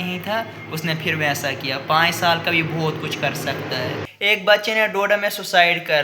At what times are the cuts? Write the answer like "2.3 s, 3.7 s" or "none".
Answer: 4.0 s